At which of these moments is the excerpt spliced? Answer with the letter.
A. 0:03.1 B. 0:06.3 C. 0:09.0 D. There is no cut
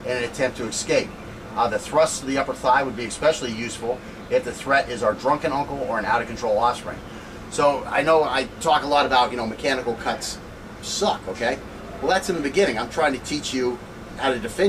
A